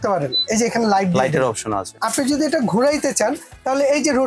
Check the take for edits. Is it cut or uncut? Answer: cut